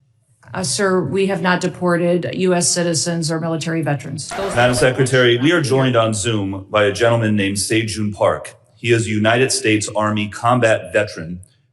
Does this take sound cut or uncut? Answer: cut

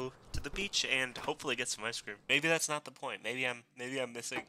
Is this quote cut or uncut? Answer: cut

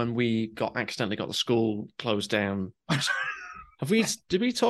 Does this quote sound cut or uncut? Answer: uncut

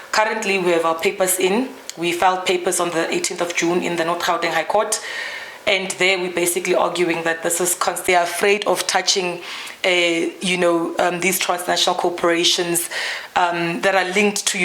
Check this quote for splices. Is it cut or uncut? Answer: cut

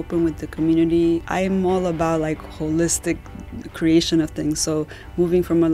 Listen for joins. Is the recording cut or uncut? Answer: cut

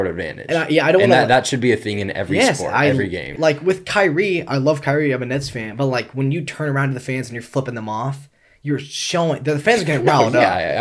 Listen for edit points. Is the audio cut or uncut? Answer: cut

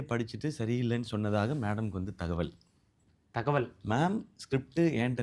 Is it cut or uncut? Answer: uncut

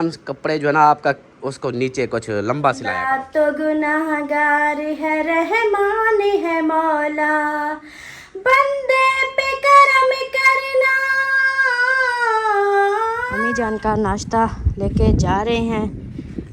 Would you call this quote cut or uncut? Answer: cut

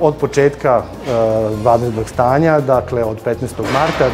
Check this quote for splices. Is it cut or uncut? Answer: uncut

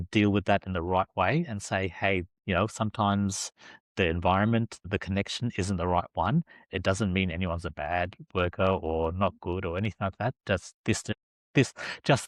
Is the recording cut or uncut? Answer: uncut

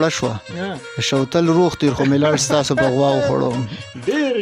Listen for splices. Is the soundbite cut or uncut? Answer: uncut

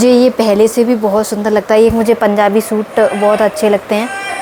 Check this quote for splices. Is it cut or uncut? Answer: uncut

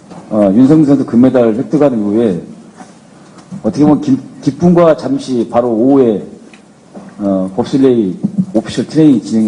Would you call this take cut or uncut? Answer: uncut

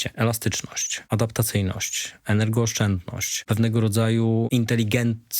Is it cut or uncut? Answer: cut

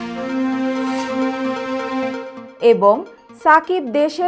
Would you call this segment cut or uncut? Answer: uncut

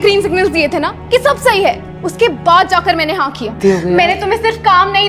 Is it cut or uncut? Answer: cut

